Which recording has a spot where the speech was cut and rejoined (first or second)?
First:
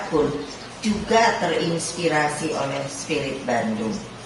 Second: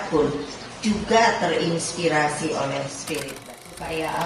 second